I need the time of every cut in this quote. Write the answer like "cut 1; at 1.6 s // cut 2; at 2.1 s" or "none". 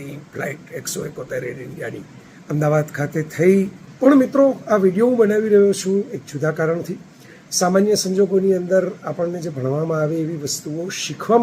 cut 1; at 3.8 s